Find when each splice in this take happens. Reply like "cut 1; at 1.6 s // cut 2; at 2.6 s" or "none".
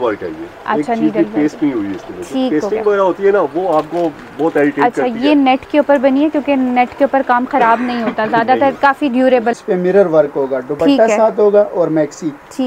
cut 1; at 9.5 s